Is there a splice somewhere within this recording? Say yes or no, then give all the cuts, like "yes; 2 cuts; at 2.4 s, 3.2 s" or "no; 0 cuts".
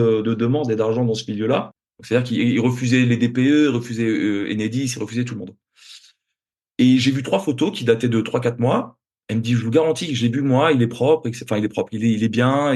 yes; 1 cut; at 1.8 s